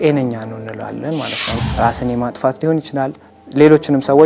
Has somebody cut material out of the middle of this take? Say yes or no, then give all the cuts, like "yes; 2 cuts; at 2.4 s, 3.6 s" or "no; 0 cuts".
yes; 1 cut; at 1.5 s